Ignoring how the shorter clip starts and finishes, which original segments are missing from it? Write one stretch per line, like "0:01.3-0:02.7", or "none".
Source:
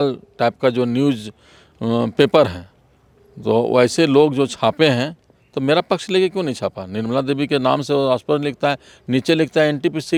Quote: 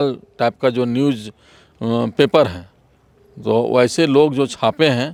none

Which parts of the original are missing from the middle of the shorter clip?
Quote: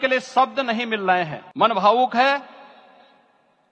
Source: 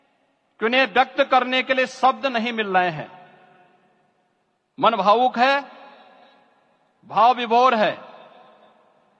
0:03.1-0:04.6

